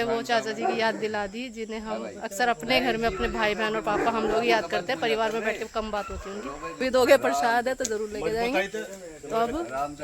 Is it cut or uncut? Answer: cut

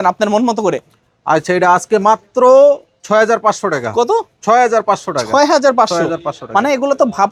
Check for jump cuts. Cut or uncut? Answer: uncut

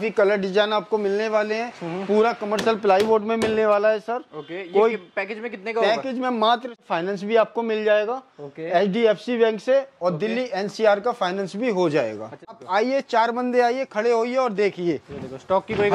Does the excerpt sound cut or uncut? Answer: cut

